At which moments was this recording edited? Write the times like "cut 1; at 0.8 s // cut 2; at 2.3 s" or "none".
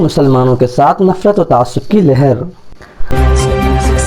cut 1; at 3.1 s